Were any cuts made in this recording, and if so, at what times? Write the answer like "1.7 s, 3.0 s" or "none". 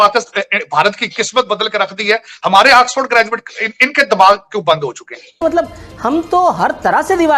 5.4 s